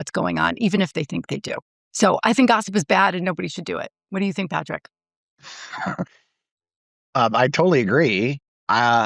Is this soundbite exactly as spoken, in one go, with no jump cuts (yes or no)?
yes